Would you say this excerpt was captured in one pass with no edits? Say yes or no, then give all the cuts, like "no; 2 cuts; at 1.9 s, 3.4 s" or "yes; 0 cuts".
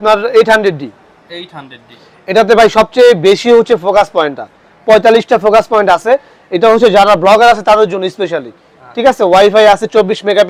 yes; 0 cuts